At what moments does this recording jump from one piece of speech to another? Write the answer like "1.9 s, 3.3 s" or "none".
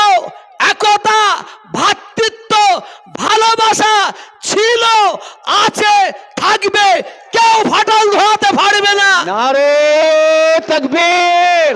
none